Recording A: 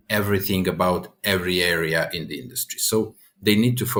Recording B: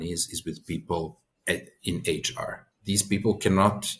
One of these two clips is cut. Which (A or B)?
B